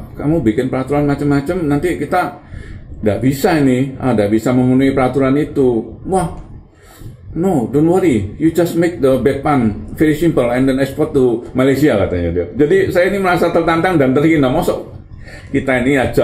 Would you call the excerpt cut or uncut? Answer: uncut